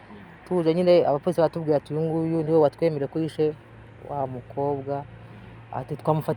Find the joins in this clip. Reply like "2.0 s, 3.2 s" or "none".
none